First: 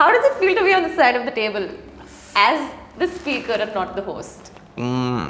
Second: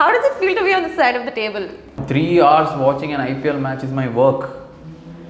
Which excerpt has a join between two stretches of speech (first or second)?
second